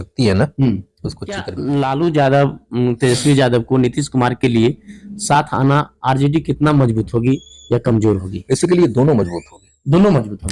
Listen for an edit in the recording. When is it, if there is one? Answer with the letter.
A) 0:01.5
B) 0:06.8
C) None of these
A